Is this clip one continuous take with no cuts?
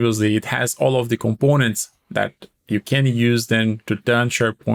yes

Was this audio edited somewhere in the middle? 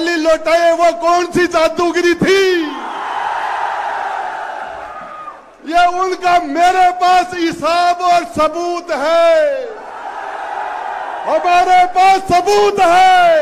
no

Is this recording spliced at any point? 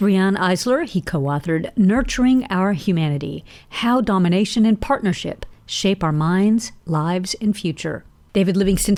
no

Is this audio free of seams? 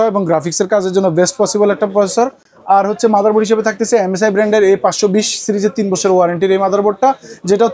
yes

